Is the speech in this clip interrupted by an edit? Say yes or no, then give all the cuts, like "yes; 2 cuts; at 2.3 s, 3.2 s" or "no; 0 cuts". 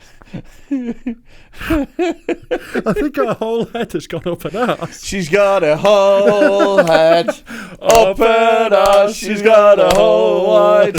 no; 0 cuts